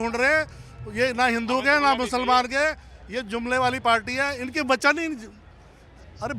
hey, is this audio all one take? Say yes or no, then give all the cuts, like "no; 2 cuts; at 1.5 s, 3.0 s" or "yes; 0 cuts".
yes; 0 cuts